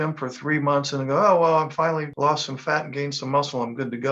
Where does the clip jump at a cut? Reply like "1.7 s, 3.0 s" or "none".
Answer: 2.1 s